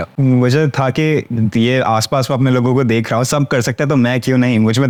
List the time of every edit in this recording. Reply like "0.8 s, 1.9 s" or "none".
none

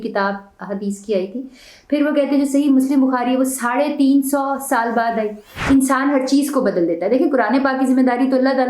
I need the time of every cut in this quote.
5.5 s

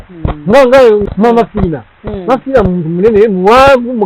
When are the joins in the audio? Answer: 1.2 s

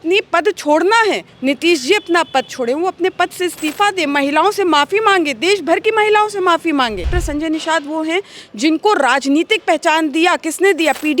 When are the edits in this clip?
1.3 s, 7.2 s

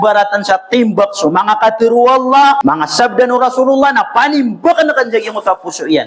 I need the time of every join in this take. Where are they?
2.6 s

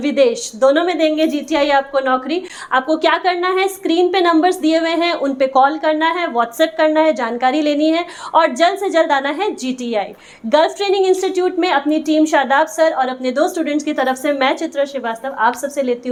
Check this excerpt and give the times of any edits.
none

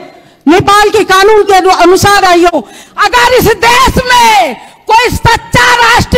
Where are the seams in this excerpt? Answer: 2.5 s

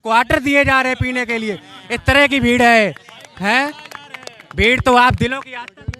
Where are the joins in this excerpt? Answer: none

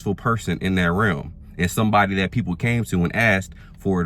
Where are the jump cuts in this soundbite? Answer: none

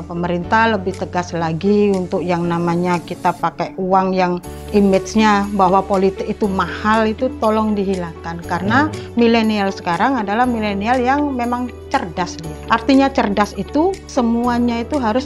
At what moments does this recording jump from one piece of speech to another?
4.5 s, 12.5 s, 14.1 s

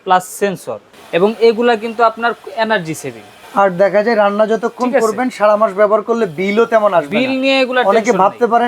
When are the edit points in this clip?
0.9 s, 3.4 s

